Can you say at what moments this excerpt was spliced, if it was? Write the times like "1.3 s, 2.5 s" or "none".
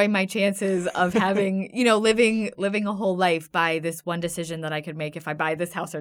none